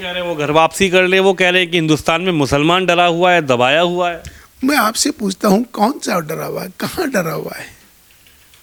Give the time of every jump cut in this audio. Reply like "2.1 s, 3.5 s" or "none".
none